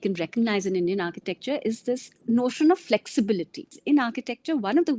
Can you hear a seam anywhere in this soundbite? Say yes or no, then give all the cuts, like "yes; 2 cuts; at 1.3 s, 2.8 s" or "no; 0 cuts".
yes; 2 cuts; at 2.1 s, 3.8 s